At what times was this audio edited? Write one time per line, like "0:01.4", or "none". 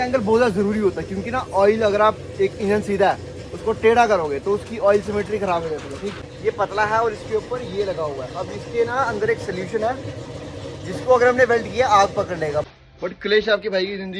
0:06.3
0:12.7